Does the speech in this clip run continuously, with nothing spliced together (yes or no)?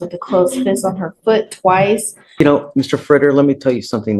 no